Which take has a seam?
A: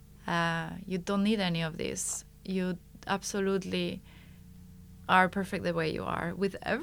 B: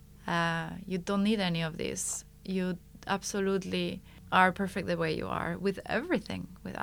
B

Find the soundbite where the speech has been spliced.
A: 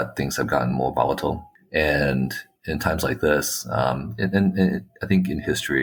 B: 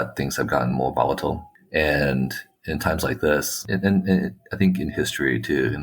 B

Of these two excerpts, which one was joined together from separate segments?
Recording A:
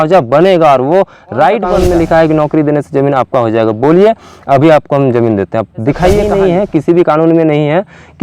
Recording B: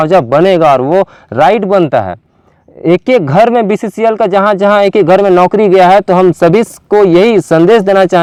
A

